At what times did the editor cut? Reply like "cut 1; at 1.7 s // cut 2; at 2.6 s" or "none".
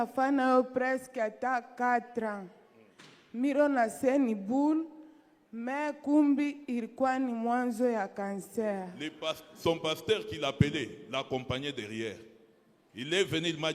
cut 1; at 9.0 s